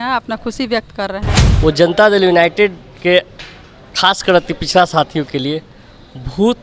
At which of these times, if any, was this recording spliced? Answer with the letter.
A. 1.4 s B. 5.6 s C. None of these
A